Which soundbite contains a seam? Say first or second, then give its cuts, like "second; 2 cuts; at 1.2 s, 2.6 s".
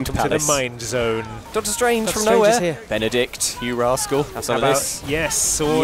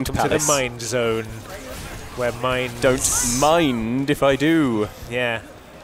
first; 3 cuts; at 1.5 s, 2.8 s, 4.4 s